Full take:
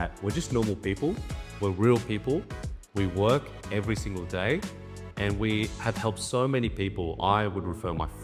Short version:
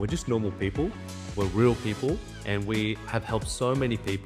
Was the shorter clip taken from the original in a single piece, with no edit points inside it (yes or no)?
no